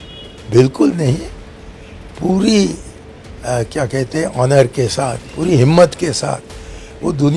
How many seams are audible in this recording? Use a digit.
1